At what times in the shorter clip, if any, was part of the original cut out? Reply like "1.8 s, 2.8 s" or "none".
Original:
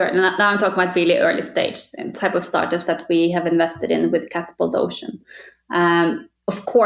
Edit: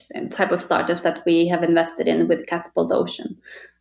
none